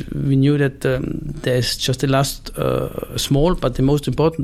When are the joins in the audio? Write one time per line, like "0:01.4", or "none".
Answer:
none